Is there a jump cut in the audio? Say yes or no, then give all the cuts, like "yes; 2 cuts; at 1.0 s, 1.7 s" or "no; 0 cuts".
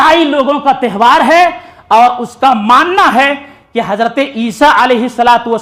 no; 0 cuts